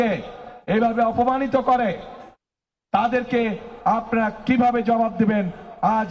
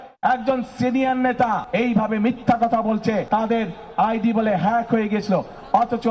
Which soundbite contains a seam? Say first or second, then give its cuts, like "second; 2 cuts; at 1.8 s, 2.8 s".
second; 2 cuts; at 1.6 s, 3.2 s